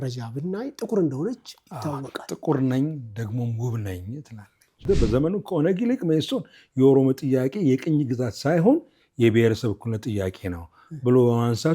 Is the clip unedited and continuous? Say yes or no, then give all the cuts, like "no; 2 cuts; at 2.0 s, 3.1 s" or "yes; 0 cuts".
no; 1 cut; at 4.8 s